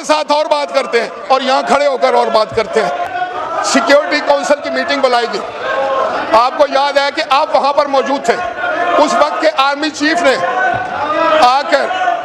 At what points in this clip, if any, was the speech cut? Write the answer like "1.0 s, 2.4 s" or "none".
none